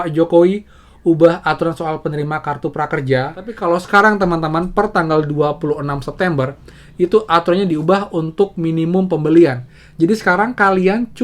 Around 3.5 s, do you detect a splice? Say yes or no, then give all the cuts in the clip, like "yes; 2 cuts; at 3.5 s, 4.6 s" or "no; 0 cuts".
yes; 1 cut; at 3.5 s